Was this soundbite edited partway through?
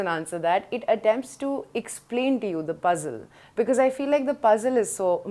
no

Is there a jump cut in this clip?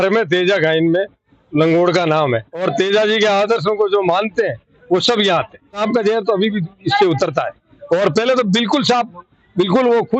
yes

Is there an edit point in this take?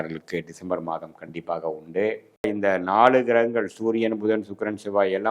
yes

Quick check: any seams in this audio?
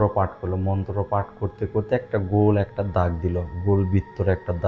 no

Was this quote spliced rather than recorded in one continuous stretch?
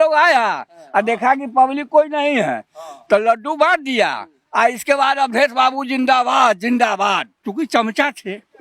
no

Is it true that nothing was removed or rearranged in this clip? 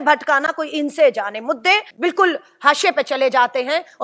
no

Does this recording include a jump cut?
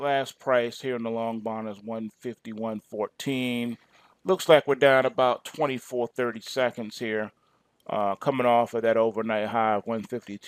no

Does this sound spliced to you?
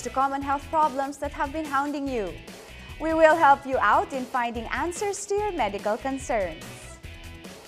no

